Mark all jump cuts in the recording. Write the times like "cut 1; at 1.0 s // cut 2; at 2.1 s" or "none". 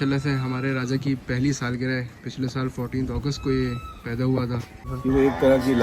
cut 1; at 4.8 s